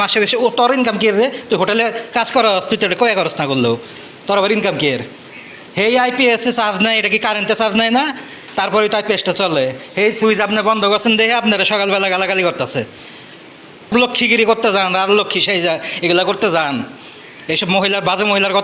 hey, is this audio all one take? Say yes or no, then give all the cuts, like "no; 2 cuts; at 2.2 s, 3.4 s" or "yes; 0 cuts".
no; 1 cut; at 13.9 s